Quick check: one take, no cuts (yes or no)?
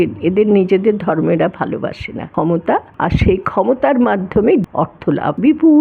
no